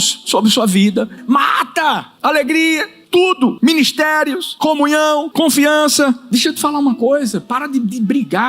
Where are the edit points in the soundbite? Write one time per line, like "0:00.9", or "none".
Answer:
0:01.2
0:02.1
0:03.3
0:04.5
0:05.3
0:06.2